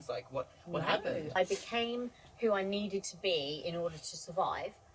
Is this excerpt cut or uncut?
cut